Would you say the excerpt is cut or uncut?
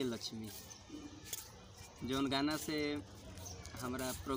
uncut